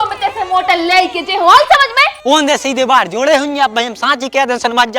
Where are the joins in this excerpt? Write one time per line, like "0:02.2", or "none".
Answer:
0:02.1